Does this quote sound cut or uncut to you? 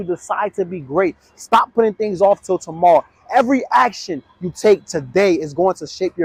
uncut